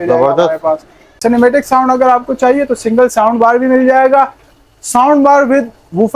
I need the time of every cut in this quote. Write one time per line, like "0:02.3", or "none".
0:01.0